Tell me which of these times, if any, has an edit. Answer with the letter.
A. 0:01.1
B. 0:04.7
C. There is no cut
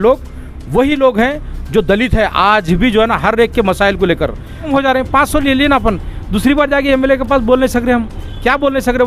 B